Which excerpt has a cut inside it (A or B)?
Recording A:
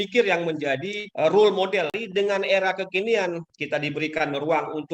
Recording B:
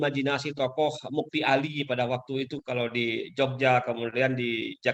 A